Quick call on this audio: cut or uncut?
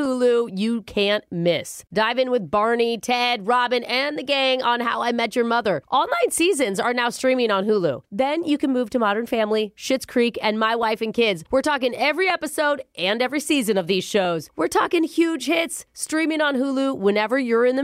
uncut